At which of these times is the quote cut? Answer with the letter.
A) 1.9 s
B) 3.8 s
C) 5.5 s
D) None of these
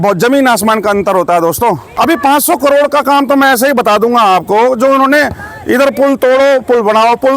A